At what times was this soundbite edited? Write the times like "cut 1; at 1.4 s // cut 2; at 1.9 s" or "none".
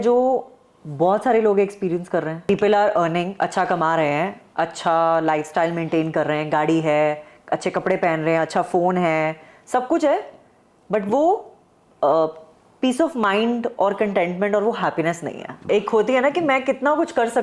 cut 1; at 2.5 s // cut 2; at 15.7 s